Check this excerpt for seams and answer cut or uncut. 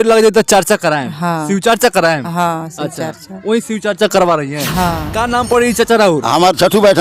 cut